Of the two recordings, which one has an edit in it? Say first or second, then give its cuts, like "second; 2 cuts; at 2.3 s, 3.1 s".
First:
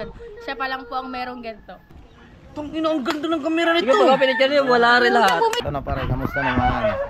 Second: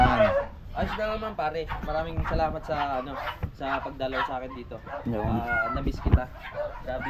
first; 2 cuts; at 1.9 s, 5.6 s